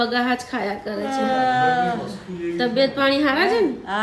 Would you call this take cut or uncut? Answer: uncut